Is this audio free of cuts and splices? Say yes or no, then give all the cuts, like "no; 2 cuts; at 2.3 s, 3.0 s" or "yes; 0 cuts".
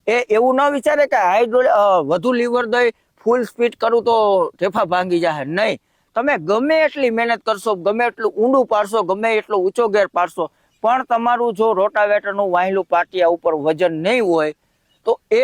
yes; 0 cuts